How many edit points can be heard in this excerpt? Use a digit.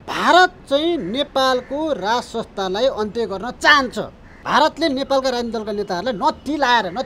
1